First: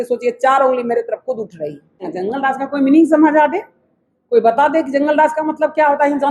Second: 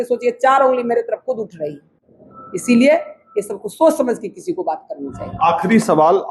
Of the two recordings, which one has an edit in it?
first; 1 cut; at 2.1 s

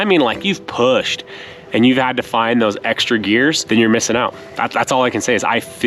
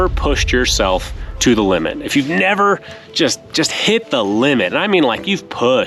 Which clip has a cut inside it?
first; 1 cut; at 3.6 s

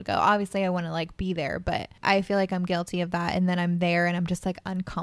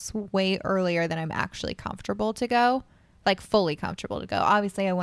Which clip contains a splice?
first; 1 cut; at 2.0 s

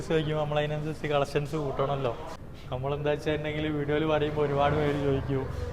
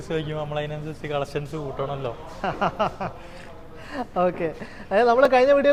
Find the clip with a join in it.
first; 1 cut; at 2.3 s

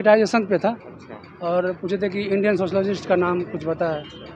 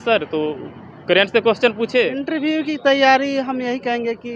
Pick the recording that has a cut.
second; 1 cut; at 2.2 s

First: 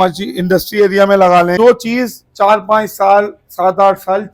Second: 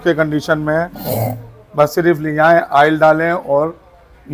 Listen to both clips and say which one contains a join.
first; 1 cut; at 1.5 s

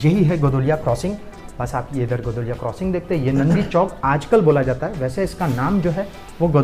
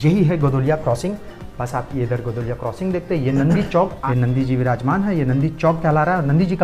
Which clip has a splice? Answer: second; 1 cut; at 4.0 s

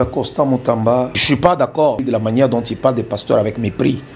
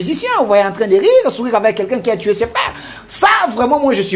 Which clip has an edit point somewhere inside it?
first; 2 cuts; at 1.2 s, 2.0 s

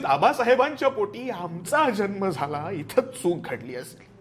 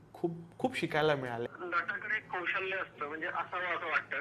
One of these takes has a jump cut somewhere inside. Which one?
second; 1 cut; at 1.5 s

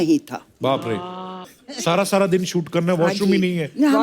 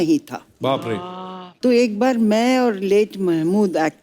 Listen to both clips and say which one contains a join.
first; 1 cut; at 1.5 s

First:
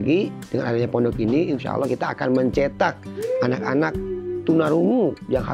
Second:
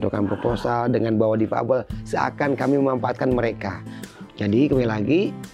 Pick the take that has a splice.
second; 1 cut; at 3.9 s

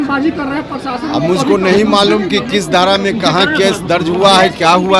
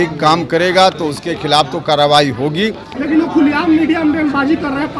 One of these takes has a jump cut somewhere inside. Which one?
second; 1 cut; at 2.9 s

